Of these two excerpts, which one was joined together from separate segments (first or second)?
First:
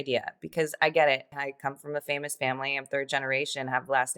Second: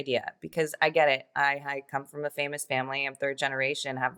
first